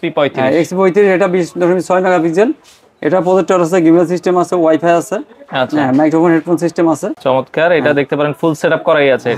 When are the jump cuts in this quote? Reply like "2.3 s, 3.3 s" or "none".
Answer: 7.1 s